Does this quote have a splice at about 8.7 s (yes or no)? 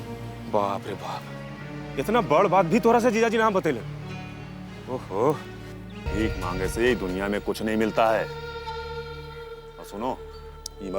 no